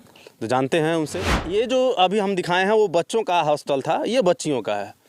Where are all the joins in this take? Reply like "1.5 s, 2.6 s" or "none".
1.4 s